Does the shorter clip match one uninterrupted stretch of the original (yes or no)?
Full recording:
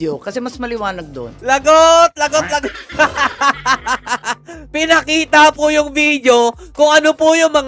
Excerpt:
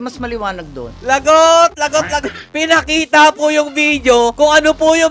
no